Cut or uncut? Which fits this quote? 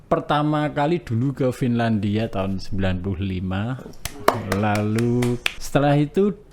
cut